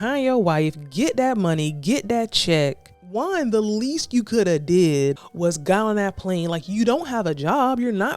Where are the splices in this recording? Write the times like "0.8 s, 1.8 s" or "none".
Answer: 2.9 s, 5.3 s